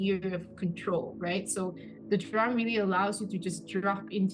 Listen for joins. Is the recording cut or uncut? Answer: uncut